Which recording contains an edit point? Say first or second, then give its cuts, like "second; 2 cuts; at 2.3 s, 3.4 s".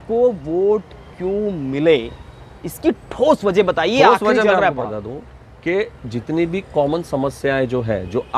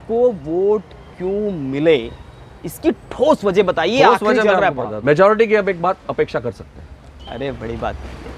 second; 1 cut; at 4.9 s